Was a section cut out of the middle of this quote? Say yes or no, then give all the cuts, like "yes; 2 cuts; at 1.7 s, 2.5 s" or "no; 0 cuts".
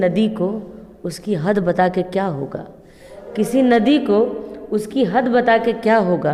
no; 0 cuts